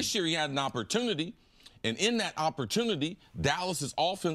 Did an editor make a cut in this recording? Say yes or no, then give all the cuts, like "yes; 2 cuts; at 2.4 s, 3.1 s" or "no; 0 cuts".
yes; 1 cut; at 3.2 s